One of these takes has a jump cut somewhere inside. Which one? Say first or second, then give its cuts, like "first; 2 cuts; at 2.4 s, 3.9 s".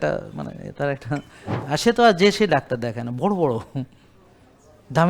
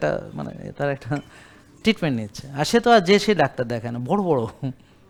first; 1 cut; at 1.5 s